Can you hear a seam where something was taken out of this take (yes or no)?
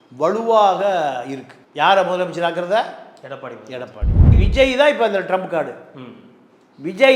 yes